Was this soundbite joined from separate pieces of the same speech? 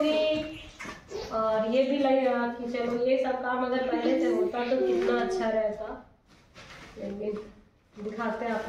no; 0 cuts

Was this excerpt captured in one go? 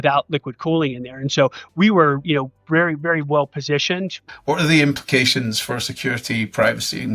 no; 1 cut; at 4.2 s

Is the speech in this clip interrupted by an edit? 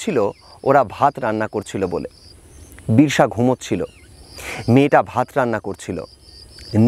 no; 0 cuts

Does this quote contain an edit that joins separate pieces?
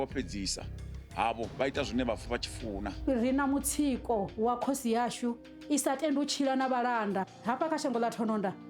yes; 2 cuts; at 2.9 s, 7.3 s

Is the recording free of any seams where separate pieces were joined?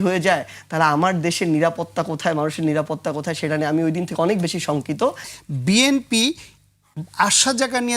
no; 1 cut; at 5.3 s

